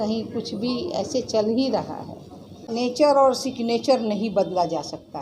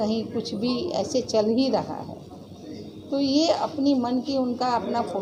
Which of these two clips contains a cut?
first; 1 cut; at 2.7 s

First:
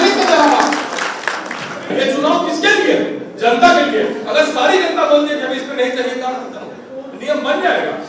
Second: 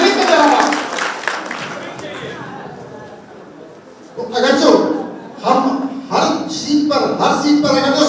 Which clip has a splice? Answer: first; 1 cut; at 1.9 s

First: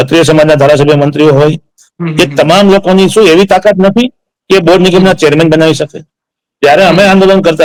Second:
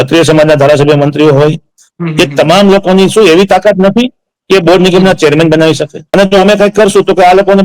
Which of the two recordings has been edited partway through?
second; 1 cut; at 6.0 s

